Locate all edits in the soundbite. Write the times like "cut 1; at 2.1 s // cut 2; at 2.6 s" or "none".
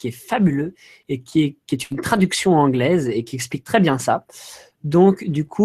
cut 1; at 3.6 s